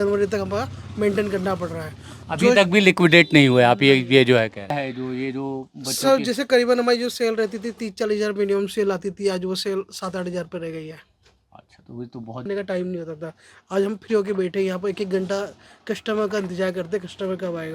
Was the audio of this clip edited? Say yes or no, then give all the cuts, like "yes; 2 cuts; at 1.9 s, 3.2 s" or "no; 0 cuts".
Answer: yes; 2 cuts; at 4.7 s, 12.5 s